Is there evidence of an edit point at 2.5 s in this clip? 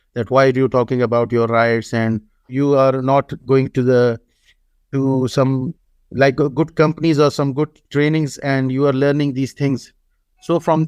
yes; 1 cut; at 2.5 s

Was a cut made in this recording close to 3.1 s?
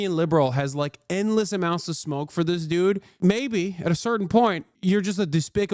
yes; 2 cuts; at 3.1 s, 4.7 s

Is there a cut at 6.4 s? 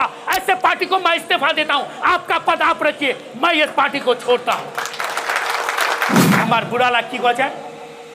yes; 1 cut; at 6.4 s

